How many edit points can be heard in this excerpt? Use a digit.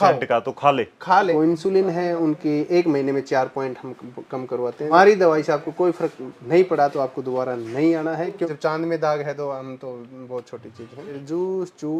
4